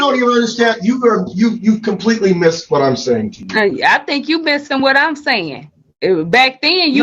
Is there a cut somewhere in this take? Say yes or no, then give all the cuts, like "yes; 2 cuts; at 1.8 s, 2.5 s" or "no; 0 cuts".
no; 0 cuts